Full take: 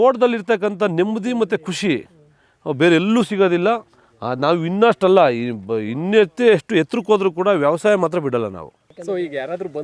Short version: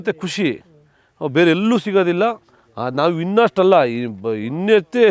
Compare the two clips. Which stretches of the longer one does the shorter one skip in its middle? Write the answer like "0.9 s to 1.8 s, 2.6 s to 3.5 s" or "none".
none